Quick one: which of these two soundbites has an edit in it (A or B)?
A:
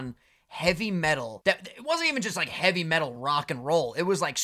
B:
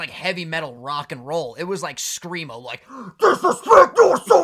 A